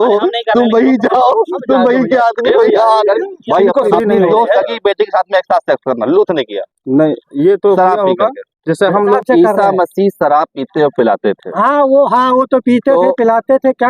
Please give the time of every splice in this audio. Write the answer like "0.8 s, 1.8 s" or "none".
3.9 s, 9.2 s